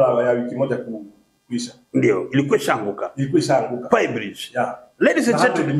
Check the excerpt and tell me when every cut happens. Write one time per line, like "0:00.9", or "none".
none

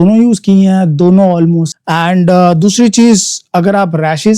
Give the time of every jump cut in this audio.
0:01.7

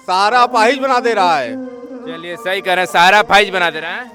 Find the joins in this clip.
none

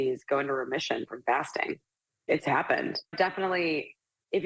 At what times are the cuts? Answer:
0:03.0

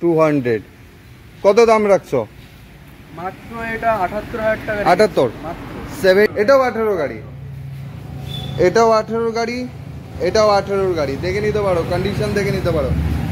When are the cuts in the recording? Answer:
0:06.3

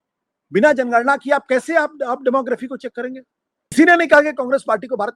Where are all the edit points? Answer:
0:03.7

